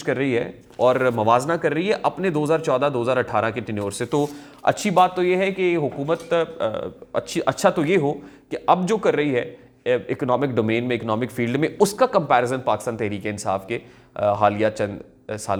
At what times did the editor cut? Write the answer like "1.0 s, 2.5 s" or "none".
none